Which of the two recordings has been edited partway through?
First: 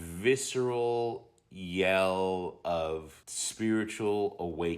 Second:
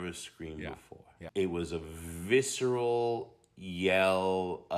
second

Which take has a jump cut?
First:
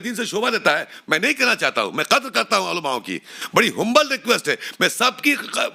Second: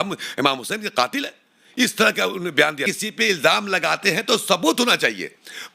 second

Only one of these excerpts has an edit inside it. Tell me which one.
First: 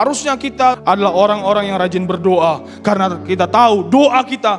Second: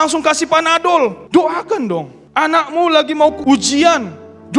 second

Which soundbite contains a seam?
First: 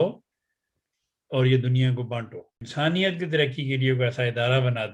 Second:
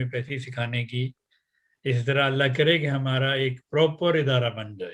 first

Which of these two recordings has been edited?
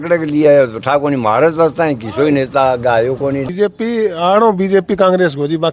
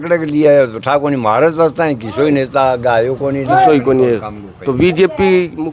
first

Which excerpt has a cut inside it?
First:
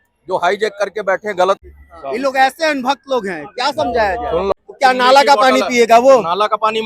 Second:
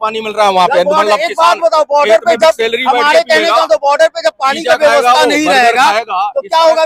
first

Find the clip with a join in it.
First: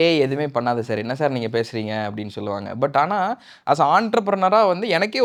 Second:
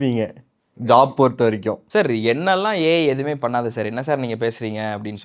second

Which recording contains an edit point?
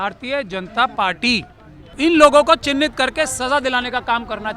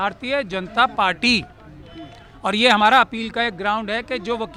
first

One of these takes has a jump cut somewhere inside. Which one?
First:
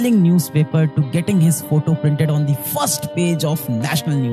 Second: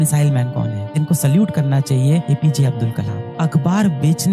second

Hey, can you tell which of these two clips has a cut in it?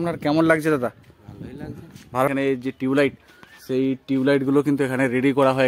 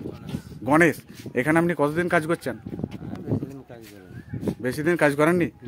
first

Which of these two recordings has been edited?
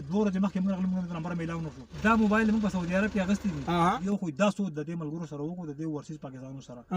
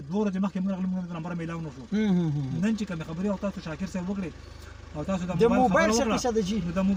first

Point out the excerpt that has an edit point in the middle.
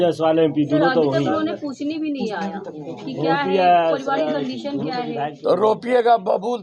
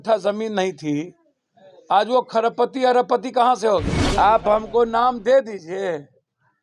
second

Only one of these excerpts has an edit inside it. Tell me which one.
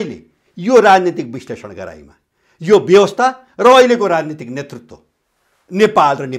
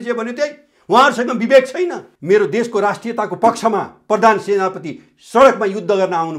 second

